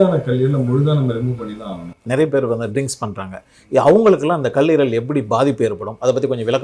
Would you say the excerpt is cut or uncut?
cut